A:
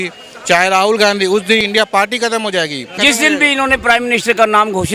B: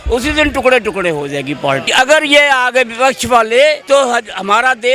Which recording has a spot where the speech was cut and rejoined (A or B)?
B